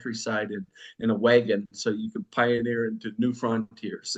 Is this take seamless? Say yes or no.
yes